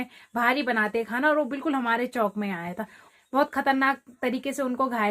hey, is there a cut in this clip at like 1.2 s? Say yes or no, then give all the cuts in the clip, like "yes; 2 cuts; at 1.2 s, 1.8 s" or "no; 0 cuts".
no; 1 cut; at 3.1 s